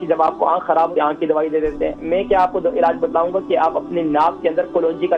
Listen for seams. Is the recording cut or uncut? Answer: cut